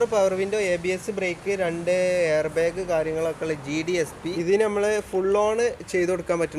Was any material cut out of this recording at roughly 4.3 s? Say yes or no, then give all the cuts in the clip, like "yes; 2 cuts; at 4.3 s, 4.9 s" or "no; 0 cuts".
yes; 1 cut; at 4.3 s